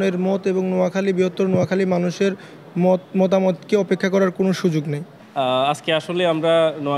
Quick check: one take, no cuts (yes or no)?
yes